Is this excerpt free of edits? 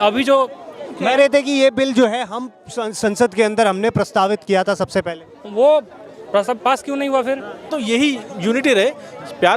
no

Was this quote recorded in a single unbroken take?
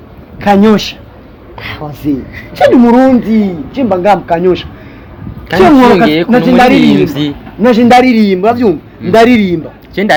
yes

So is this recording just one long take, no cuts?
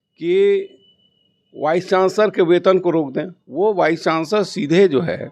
yes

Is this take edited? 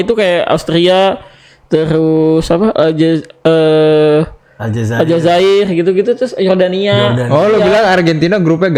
no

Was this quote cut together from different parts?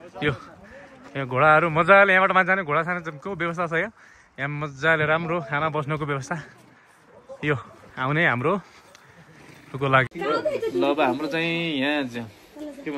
yes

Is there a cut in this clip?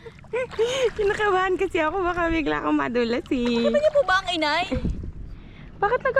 no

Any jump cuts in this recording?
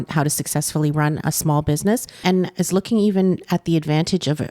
yes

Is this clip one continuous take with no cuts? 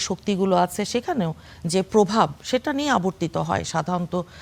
yes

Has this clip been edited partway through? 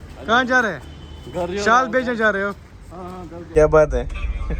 yes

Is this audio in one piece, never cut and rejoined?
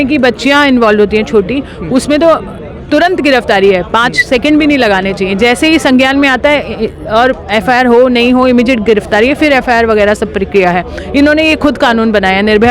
yes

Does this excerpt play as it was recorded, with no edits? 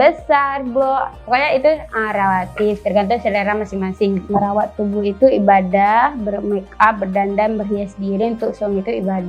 no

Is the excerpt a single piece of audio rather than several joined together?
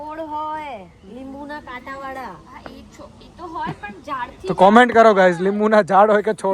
yes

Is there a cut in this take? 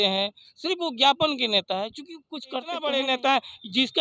yes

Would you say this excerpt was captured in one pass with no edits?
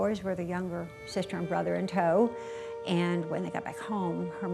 yes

